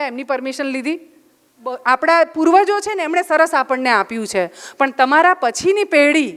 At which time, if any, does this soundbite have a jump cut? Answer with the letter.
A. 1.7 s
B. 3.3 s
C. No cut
A